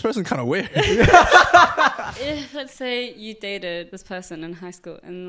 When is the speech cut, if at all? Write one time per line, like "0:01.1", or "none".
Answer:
0:02.0
0:04.0